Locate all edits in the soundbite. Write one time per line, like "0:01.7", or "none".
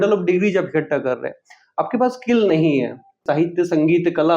0:03.2